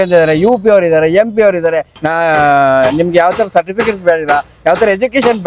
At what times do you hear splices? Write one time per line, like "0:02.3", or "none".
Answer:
0:02.0